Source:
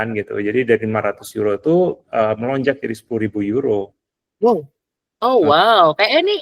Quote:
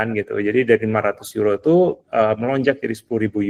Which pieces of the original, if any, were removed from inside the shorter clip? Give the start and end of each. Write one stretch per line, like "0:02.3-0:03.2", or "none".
none